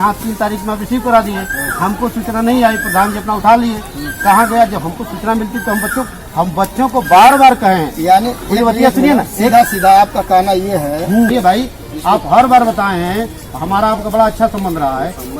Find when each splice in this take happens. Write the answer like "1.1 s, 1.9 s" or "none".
11.3 s